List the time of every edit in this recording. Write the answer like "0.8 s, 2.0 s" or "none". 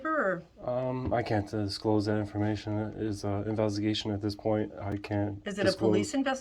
none